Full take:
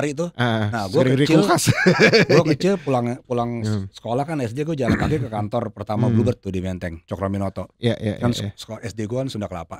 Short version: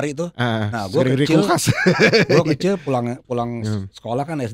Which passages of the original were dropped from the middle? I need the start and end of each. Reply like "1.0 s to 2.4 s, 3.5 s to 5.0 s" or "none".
none